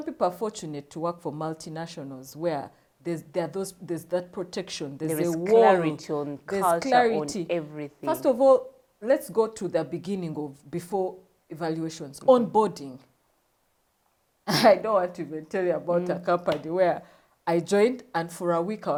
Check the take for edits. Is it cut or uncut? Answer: uncut